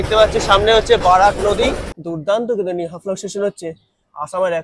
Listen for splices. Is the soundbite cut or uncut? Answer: cut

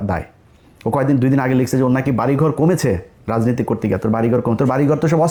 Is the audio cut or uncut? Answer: uncut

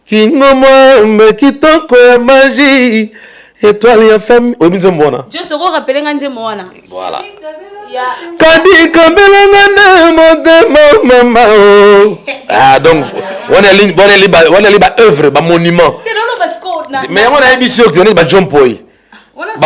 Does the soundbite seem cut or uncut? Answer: uncut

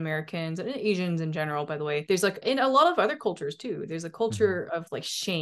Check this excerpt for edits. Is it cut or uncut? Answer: uncut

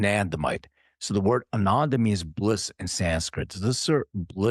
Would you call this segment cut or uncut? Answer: uncut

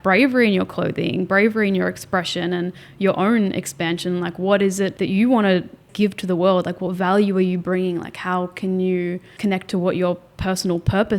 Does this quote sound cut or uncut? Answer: cut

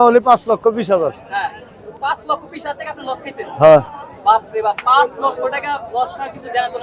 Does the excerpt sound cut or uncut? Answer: uncut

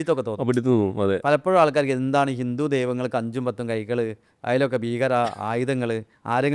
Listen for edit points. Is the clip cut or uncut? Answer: uncut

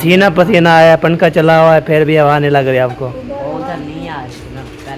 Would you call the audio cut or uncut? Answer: uncut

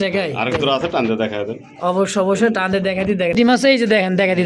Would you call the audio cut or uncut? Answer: cut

